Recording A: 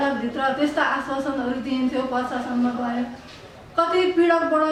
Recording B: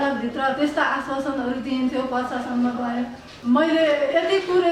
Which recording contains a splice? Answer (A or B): B